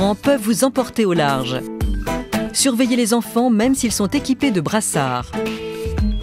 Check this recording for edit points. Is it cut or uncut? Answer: cut